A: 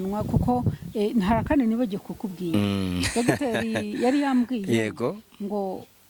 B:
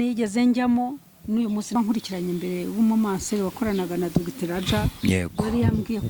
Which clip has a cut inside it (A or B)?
B